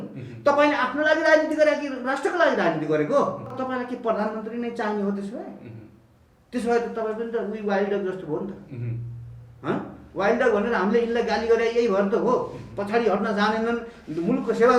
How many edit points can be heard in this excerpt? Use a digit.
1